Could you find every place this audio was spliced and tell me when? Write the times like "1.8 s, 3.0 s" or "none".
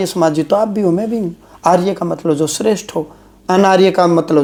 none